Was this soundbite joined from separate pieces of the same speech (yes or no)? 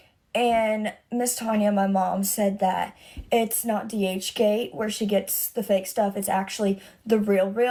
no